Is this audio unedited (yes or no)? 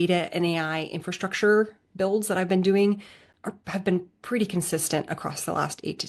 yes